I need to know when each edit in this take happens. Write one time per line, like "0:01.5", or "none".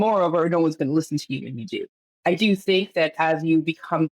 0:01.9